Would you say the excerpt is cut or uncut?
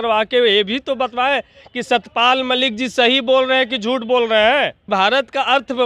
cut